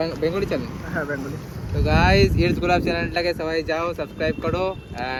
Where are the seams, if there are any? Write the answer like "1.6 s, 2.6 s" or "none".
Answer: none